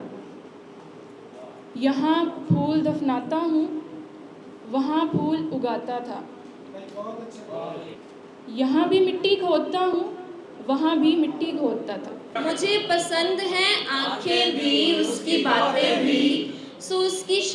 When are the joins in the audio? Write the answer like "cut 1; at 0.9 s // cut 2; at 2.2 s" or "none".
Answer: cut 1; at 8.0 s // cut 2; at 12.2 s